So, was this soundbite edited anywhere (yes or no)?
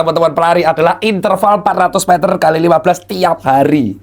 no